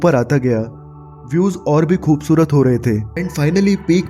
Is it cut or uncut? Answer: cut